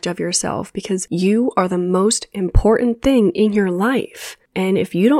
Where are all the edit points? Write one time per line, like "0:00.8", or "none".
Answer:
0:01.0